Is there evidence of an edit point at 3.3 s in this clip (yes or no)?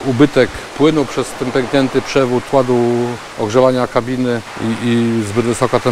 yes